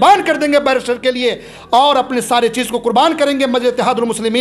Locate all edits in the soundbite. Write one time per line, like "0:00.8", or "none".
none